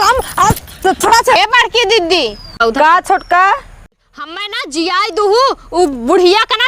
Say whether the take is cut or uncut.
cut